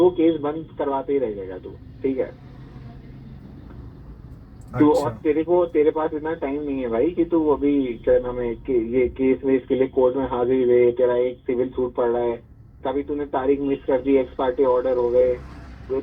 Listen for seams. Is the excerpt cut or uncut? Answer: uncut